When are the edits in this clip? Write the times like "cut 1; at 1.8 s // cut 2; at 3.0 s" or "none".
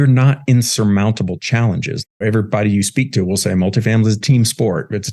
cut 1; at 2.2 s